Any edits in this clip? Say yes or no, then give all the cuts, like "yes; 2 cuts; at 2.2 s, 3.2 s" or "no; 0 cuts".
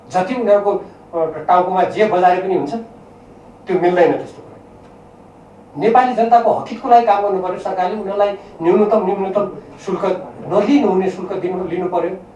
no; 0 cuts